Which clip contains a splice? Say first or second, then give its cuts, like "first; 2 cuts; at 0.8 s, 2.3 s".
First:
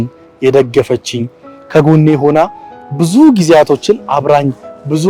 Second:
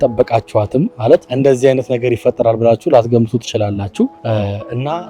second; 2 cuts; at 1.3 s, 4.2 s